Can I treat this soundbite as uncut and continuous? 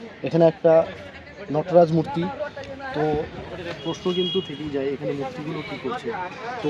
yes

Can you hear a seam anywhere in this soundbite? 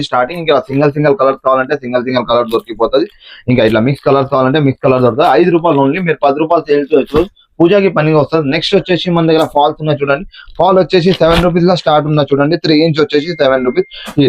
no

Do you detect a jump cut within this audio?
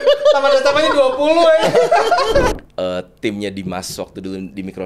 yes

